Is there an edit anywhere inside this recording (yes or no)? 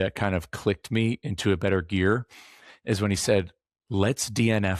no